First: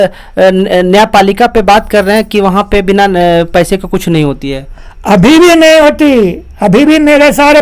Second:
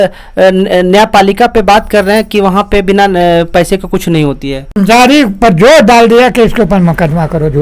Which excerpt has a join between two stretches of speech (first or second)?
second